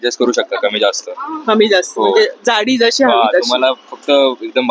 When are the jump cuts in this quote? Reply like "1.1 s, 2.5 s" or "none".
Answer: none